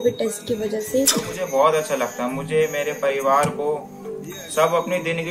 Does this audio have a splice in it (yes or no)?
yes